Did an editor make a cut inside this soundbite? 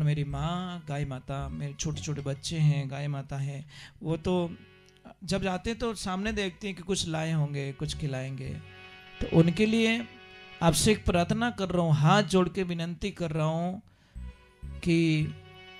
no; 0 cuts

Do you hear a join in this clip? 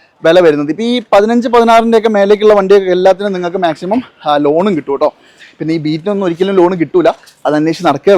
no; 0 cuts

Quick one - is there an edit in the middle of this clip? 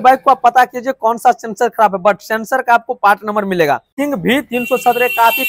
yes; 1 cut; at 3.9 s

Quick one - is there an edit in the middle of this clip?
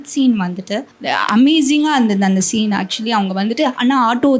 yes; 1 cut; at 1.0 s

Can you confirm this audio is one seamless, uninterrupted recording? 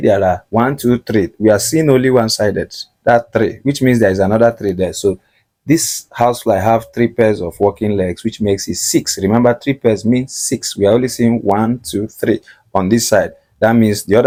yes; 0 cuts

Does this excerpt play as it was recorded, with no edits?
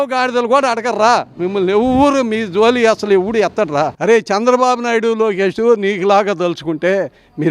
no; 1 cut; at 3.9 s

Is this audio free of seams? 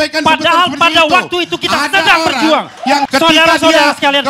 no; 1 cut; at 3.1 s

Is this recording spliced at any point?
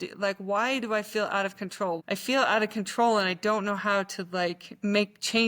yes; 1 cut; at 2.0 s

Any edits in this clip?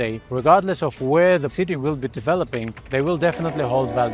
no; 0 cuts

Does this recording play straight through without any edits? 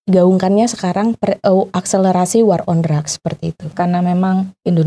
no; 1 cut; at 3.7 s

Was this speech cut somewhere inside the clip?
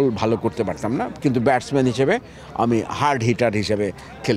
no; 0 cuts

